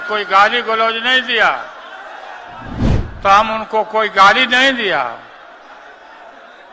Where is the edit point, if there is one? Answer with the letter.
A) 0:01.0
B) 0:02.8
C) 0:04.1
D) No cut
B